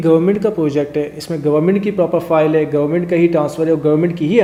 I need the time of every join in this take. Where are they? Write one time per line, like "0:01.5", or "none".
none